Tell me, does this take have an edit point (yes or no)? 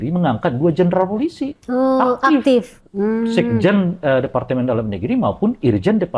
no